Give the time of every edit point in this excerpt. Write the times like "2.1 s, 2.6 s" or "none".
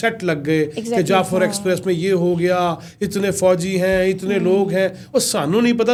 none